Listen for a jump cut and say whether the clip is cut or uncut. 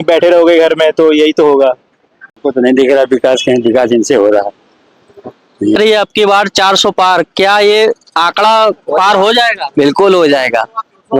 cut